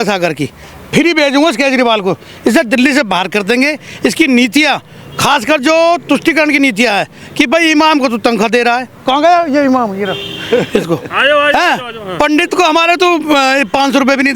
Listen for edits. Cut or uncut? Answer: uncut